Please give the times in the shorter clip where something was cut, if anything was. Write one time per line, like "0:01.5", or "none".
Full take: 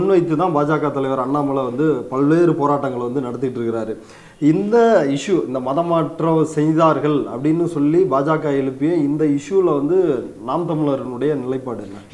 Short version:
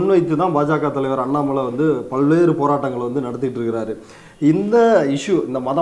none